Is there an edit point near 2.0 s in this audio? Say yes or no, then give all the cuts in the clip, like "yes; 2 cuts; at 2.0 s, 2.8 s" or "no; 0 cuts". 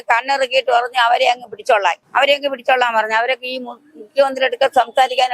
yes; 1 cut; at 2.0 s